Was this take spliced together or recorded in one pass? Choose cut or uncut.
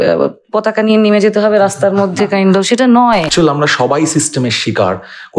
cut